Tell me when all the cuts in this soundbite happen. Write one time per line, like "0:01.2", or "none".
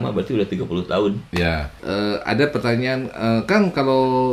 0:01.7